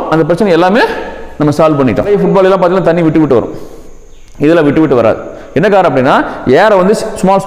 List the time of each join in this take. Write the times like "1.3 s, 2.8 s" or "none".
2.1 s